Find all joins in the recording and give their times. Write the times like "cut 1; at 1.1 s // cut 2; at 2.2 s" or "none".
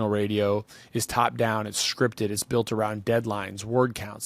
none